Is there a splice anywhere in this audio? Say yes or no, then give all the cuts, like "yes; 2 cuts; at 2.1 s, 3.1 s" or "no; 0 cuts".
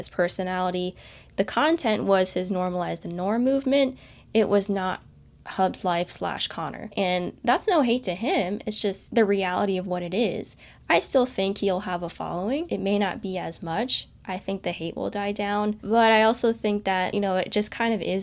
no; 0 cuts